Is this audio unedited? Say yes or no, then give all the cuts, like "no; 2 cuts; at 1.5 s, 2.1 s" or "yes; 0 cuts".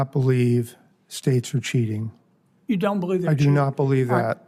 yes; 0 cuts